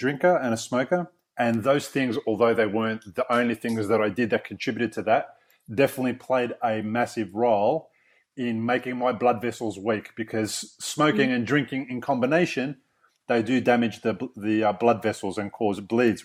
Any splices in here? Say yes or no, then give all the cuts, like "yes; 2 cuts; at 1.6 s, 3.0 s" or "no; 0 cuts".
no; 0 cuts